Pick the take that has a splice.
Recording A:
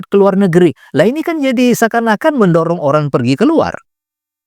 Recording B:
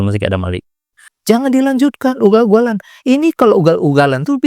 B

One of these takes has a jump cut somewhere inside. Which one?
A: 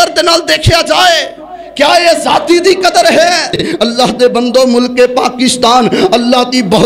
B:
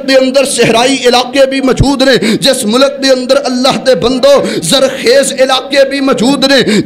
A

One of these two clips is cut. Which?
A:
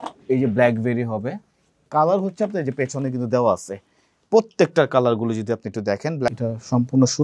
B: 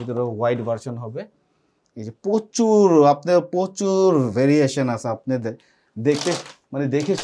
A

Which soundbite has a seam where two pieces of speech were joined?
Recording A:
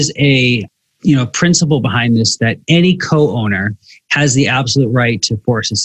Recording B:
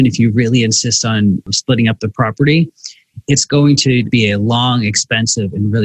B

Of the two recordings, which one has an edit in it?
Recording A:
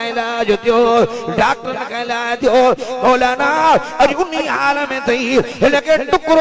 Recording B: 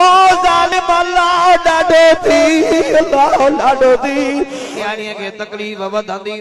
B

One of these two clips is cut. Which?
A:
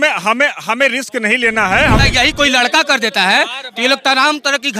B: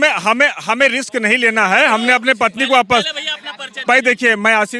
A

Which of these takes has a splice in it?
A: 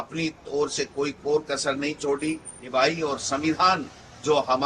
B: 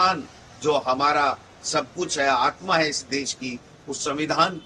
A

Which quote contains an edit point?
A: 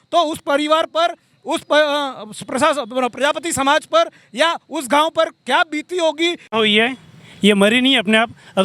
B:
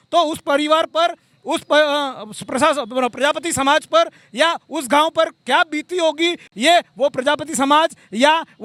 A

